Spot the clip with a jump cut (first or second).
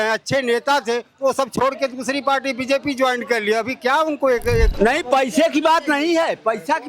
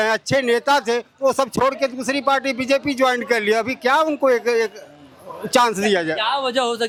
first